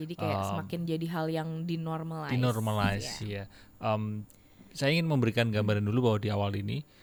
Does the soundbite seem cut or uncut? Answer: uncut